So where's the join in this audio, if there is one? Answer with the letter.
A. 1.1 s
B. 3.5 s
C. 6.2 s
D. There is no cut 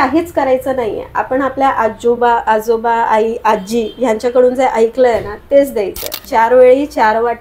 C